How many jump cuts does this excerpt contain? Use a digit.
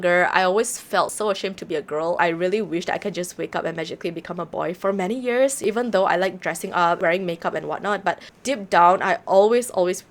2